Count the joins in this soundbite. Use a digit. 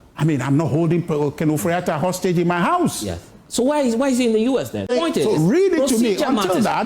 1